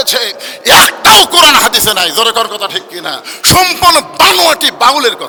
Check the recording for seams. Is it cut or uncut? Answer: uncut